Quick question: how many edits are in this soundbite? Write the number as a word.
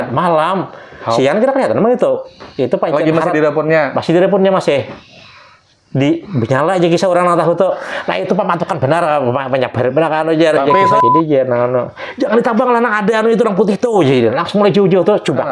one